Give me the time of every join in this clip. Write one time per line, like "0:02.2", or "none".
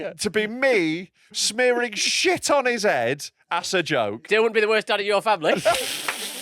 0:04.2